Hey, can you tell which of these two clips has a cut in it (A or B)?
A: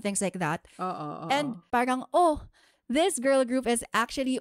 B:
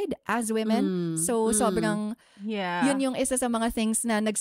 A